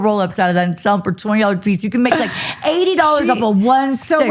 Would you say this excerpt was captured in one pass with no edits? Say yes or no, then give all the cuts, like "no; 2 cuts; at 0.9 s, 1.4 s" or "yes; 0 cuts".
yes; 0 cuts